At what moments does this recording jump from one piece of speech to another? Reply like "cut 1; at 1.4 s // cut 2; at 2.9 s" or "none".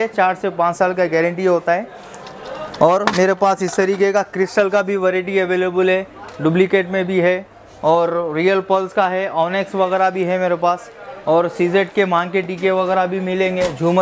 none